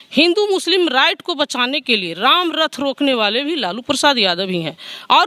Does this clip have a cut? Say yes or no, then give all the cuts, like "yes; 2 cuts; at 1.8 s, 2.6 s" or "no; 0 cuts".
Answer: no; 0 cuts